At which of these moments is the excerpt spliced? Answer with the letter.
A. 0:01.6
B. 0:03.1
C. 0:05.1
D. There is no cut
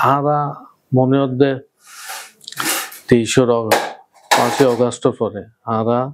D